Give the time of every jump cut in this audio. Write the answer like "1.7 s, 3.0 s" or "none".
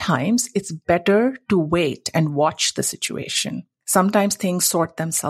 3.7 s